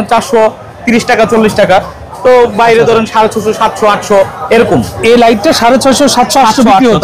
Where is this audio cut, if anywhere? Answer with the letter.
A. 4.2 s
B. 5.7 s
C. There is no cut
C